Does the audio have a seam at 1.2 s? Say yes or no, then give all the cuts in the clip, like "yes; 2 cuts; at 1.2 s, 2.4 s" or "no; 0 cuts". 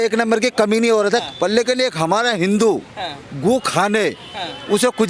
yes; 1 cut; at 1.2 s